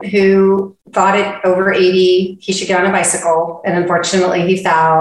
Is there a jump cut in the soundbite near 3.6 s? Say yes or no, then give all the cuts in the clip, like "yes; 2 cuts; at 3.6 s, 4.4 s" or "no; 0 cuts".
no; 0 cuts